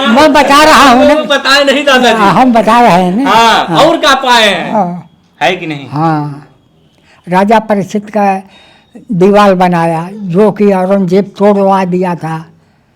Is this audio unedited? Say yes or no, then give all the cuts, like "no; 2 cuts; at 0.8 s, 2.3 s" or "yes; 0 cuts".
no; 1 cut; at 4.7 s